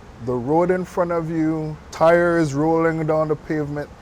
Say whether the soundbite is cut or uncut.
cut